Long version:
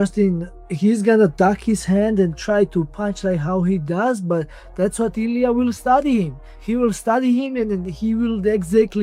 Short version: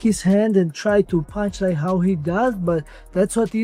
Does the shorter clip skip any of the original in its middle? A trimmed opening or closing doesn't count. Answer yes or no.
no